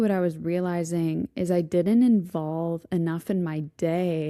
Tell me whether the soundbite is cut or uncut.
uncut